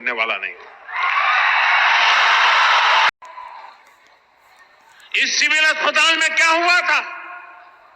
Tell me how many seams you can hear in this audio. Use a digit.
1